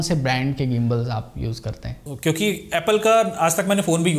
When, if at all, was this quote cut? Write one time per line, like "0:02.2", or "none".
0:01.9

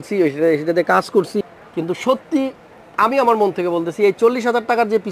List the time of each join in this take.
0:01.4

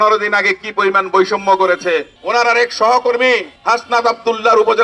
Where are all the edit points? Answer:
0:02.2

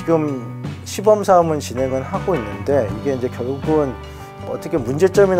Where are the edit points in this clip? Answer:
0:04.4

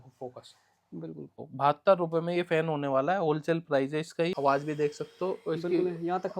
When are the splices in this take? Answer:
0:01.4
0:04.3

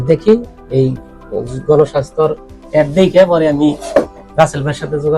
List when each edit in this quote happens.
none

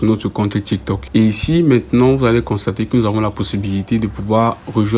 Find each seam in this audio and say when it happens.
0:01.0

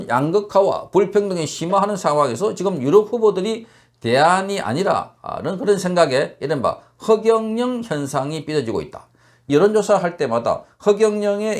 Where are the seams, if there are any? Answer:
0:09.3

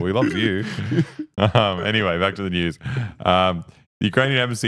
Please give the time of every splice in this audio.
0:01.2

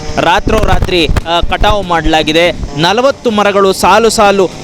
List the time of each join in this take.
0:02.6

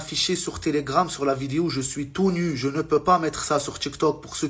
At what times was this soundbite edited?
none

